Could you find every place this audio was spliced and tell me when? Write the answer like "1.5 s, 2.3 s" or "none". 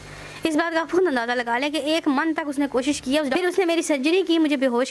3.3 s